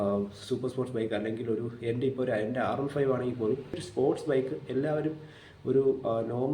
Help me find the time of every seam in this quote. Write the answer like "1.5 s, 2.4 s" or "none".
3.7 s